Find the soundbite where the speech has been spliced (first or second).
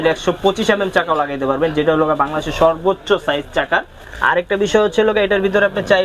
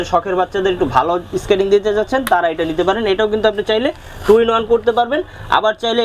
first